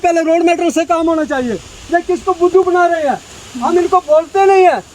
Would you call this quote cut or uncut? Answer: uncut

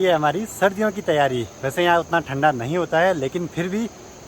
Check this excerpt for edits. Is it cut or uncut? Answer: uncut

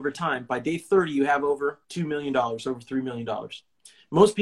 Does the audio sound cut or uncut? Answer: cut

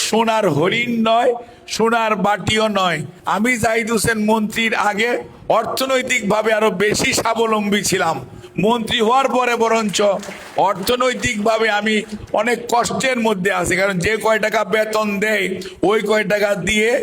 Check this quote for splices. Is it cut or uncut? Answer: cut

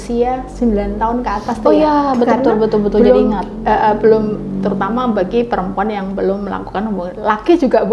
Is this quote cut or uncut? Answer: uncut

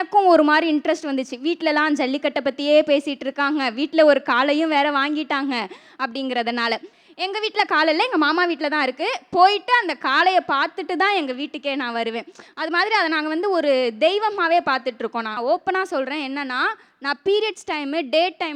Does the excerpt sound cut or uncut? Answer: uncut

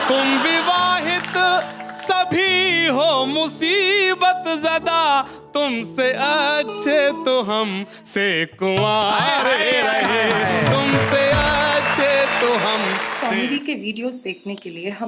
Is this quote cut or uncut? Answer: cut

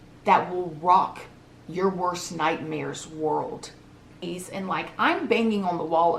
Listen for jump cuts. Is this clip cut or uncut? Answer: cut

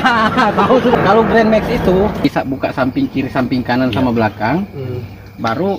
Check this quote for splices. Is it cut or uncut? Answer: cut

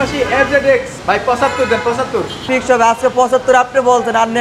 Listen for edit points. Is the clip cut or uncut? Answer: cut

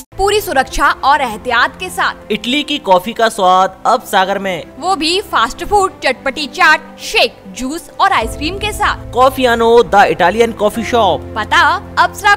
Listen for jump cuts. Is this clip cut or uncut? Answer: uncut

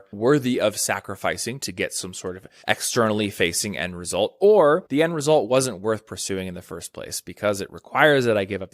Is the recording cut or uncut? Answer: cut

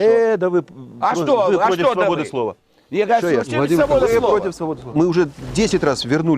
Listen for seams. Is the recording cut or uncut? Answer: cut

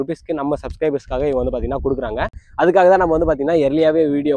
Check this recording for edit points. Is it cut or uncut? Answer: uncut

